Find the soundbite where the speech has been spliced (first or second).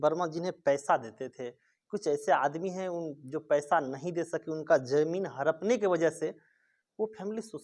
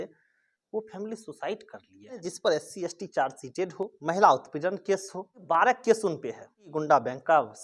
second